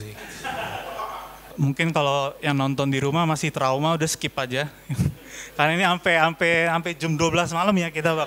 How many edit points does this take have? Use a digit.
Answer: 1